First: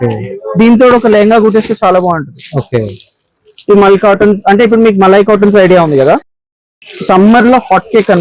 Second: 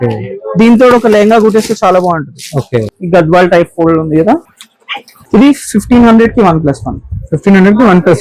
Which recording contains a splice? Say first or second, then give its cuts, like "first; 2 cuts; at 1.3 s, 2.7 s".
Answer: second; 1 cut; at 2.9 s